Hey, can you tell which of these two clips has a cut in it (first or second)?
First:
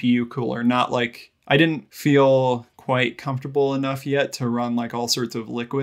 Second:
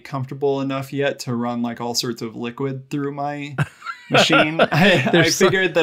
first